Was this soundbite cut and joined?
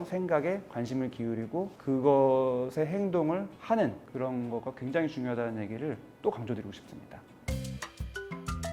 yes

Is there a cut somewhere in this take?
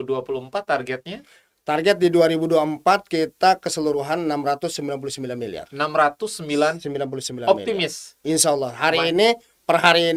no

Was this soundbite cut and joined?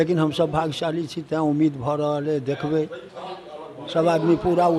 no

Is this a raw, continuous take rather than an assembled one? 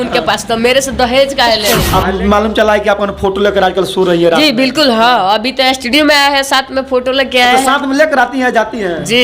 no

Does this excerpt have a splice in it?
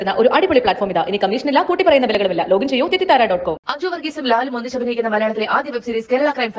no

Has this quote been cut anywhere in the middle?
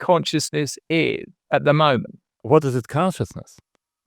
yes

